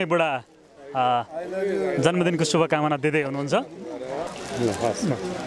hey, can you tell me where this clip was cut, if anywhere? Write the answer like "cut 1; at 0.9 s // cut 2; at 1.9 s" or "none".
cut 1; at 4.3 s